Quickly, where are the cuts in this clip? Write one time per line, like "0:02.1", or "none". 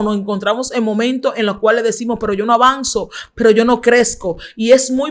none